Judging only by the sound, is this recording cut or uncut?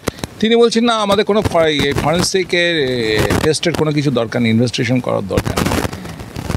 uncut